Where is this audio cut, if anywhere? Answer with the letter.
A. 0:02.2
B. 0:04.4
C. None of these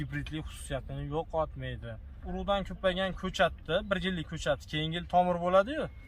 A